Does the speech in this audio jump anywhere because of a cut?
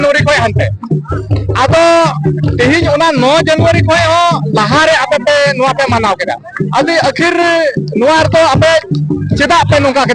no; 0 cuts

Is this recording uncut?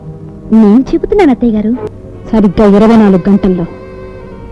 no; 1 cut; at 1.9 s

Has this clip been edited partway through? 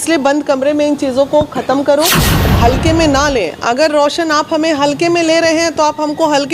yes; 1 cut; at 2.4 s

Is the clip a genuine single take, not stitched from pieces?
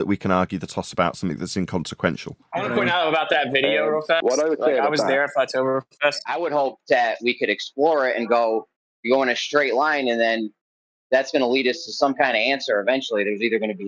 no; 2 cuts; at 2.4 s, 6.2 s

